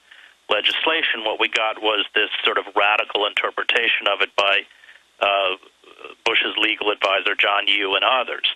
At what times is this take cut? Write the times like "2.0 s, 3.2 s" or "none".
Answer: 2.1 s